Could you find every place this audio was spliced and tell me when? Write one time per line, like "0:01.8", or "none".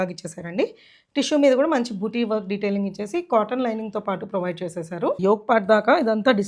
0:05.2